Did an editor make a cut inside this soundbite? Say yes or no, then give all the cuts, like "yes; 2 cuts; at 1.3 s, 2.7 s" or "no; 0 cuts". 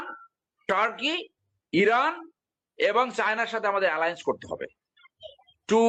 no; 0 cuts